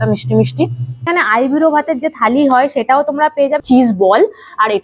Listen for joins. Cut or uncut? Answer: cut